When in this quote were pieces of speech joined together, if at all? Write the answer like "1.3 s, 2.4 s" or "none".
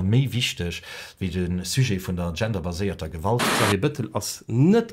3.5 s